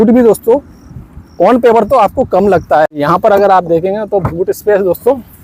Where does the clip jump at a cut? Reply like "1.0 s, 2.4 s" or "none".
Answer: none